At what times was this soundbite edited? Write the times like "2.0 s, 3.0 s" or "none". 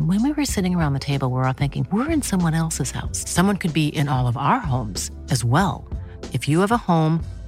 none